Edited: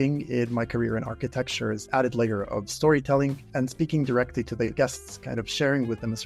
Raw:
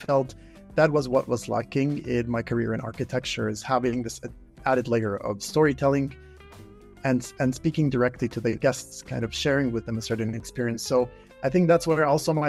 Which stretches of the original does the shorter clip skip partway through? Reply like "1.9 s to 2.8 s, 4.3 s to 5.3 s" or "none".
3.6 s to 4.5 s, 6.2 s to 7.3 s